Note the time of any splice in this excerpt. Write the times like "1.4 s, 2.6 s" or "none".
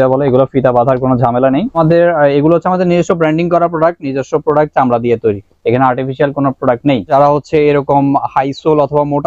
1.7 s, 7.1 s

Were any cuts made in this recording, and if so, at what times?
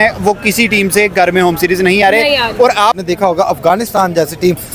3.0 s

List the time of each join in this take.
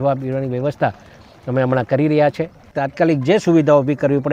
2.8 s

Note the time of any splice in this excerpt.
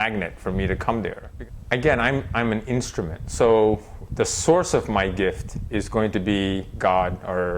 1.2 s

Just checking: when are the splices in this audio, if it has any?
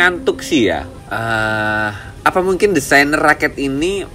1.0 s, 2.0 s

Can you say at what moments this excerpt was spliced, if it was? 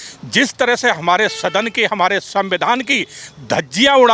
none

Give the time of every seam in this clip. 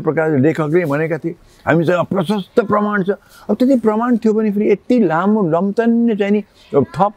none

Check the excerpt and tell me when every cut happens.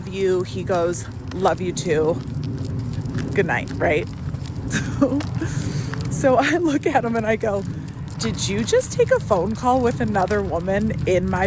none

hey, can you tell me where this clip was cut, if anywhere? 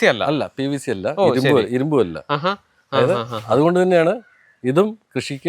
none

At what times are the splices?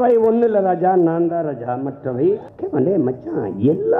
2.5 s

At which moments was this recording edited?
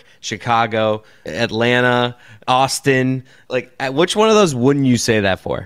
1.2 s, 2.3 s, 3.4 s

